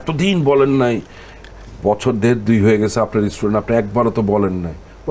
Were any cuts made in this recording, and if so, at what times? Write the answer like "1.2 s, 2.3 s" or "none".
none